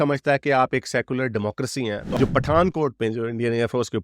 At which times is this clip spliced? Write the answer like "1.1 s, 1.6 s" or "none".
2.1 s

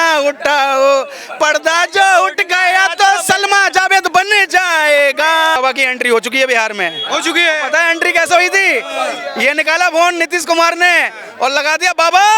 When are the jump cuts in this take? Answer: 5.6 s

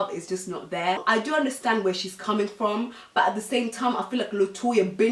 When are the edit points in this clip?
1.0 s

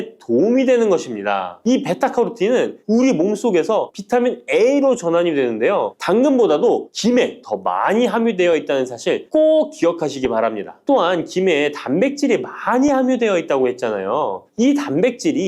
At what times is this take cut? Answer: 1.5 s, 6.0 s, 10.7 s

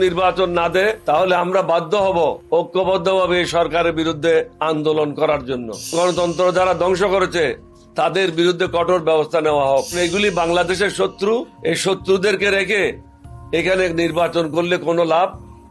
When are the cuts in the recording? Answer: 1.0 s, 2.4 s, 4.5 s, 5.9 s, 10.0 s, 11.5 s

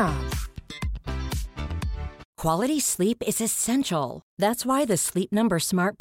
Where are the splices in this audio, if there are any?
2.2 s

